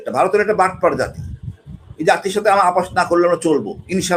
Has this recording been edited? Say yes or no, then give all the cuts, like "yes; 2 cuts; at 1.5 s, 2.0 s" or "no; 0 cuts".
no; 0 cuts